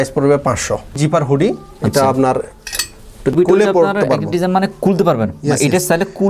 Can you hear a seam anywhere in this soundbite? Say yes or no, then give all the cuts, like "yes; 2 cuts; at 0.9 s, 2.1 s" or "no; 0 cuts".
yes; 2 cuts; at 1.0 s, 3.3 s